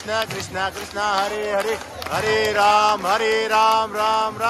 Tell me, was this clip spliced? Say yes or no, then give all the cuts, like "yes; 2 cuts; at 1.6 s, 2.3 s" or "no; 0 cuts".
no; 0 cuts